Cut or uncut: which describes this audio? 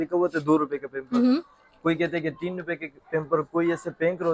uncut